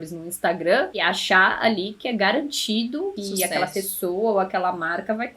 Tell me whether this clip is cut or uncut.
cut